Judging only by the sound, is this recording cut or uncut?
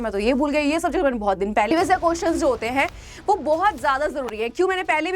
cut